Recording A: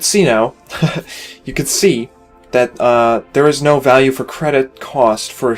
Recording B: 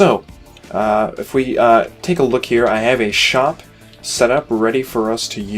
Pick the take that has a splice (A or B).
B